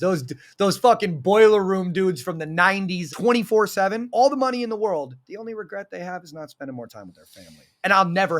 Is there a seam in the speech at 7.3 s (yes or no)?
no